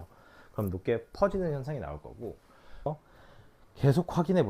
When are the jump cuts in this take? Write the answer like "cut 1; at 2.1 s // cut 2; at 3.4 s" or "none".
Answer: cut 1; at 2.9 s